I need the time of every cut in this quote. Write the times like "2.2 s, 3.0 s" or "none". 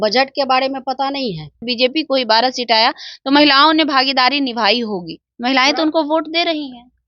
1.7 s